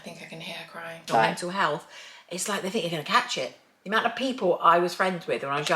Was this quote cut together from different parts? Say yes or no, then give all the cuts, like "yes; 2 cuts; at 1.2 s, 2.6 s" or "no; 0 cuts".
yes; 1 cut; at 1.0 s